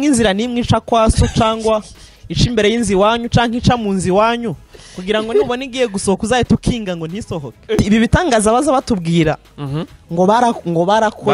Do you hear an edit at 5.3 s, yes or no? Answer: no